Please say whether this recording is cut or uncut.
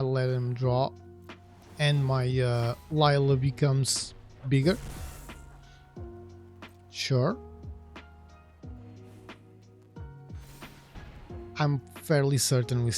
cut